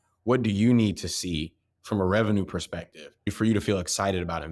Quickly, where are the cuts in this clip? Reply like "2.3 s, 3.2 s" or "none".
3.3 s